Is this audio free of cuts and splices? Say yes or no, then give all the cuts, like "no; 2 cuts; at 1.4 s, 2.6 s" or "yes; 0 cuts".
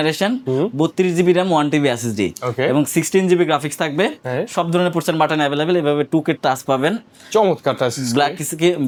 yes; 0 cuts